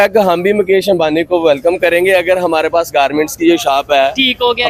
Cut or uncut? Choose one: uncut